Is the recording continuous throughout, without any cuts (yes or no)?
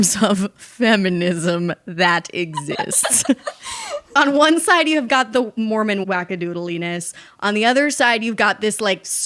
no